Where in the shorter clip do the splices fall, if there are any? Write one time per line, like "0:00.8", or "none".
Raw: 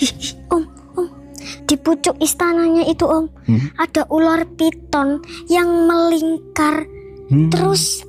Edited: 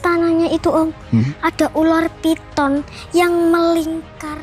none